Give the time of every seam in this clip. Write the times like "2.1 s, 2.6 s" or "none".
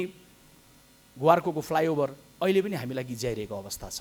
none

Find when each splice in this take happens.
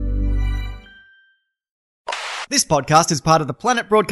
1.9 s

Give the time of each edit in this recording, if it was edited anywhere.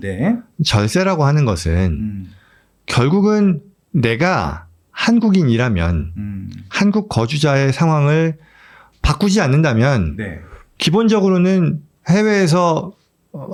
none

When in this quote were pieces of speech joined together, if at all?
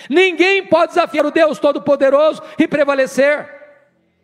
1.2 s

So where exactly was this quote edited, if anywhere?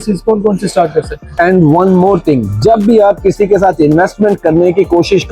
1.2 s

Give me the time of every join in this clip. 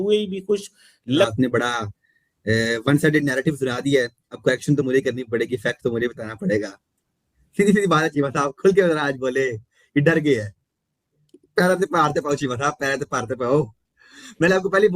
1.3 s

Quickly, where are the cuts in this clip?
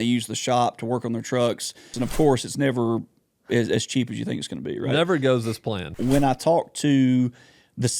1.9 s, 5.9 s

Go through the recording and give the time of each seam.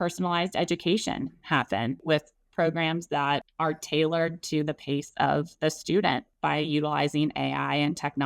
2.0 s, 3.5 s, 6.3 s

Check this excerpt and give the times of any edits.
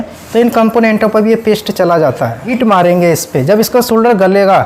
2.5 s

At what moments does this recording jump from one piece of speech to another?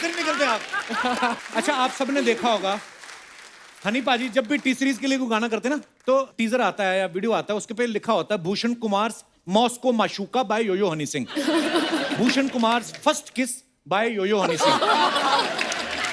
1.4 s

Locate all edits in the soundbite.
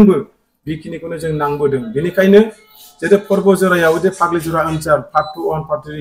none

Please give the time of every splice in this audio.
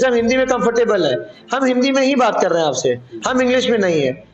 none

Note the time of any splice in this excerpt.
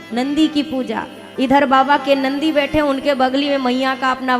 1.2 s

